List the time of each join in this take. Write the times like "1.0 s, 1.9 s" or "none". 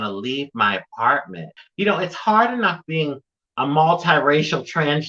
1.5 s